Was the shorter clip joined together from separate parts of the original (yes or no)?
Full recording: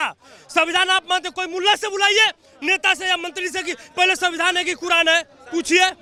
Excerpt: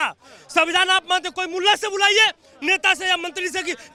no